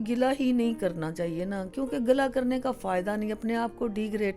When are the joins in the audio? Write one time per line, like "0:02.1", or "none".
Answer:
none

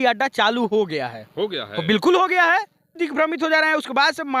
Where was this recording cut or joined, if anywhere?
0:02.9

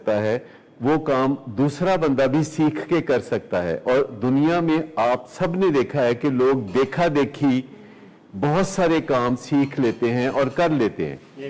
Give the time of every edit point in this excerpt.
none

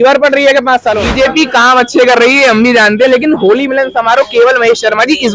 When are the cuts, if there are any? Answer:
0:01.0

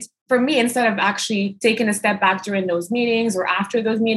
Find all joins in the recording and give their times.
0:01.5

